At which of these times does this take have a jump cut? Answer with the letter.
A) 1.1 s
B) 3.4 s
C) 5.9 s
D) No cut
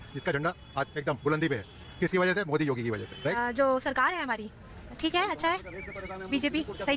B